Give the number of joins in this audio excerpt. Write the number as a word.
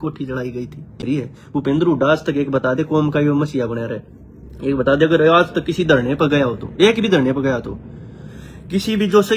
one